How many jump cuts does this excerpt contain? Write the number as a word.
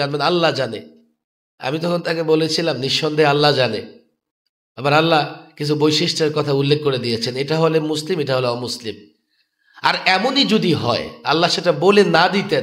zero